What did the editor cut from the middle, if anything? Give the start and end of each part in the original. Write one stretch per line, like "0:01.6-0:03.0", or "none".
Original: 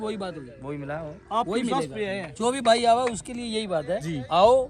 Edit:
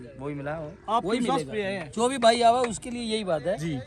none